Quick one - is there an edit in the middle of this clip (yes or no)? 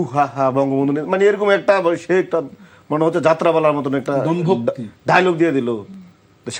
no